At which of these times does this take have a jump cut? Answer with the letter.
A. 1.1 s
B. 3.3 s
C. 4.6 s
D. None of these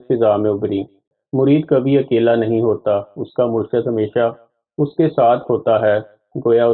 A